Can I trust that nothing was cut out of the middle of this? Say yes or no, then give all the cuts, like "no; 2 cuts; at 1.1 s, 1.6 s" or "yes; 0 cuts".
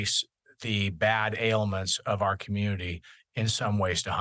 yes; 0 cuts